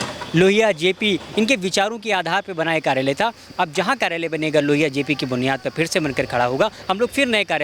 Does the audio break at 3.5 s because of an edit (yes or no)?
no